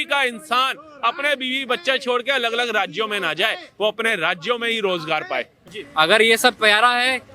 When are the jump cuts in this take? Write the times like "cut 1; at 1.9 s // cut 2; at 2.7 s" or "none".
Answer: cut 1; at 5.6 s

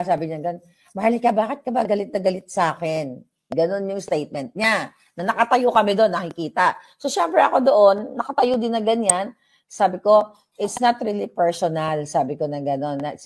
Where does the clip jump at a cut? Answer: none

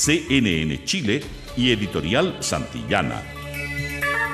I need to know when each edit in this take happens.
cut 1; at 3.2 s

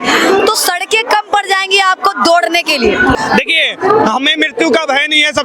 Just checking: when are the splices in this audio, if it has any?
cut 1; at 3.1 s

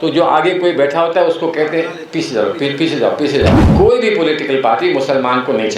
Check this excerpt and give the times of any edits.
cut 1; at 3.6 s

